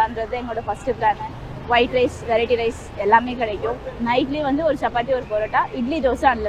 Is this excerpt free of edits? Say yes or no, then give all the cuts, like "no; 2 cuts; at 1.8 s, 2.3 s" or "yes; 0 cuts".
yes; 0 cuts